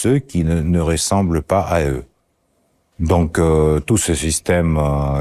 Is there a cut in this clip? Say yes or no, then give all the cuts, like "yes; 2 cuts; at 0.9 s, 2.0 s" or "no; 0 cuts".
no; 0 cuts